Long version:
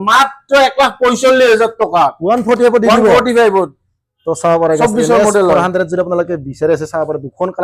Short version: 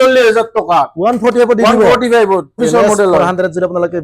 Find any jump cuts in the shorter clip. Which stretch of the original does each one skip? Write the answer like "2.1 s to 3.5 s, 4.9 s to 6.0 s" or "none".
3.8 s to 4.9 s